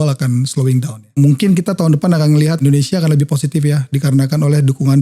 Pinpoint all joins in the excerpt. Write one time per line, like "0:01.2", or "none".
0:01.2
0:02.6